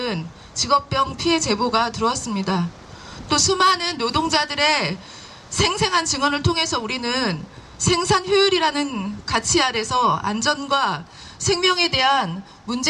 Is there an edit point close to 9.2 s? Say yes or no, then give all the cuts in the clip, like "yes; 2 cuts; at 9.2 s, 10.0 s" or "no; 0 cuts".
no; 1 cut; at 3.8 s